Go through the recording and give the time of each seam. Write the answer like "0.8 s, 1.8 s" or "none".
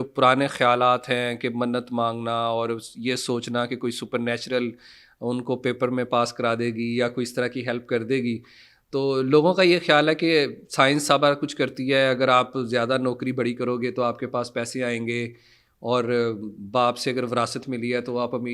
none